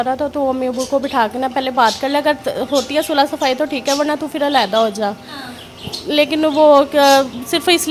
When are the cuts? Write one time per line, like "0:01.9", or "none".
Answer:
none